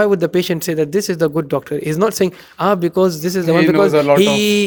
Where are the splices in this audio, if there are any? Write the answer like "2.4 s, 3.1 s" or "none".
none